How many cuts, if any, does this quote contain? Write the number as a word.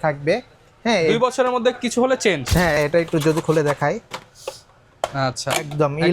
one